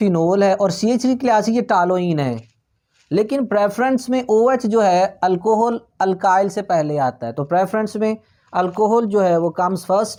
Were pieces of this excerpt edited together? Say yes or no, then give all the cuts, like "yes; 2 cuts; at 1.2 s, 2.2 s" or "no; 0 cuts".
no; 0 cuts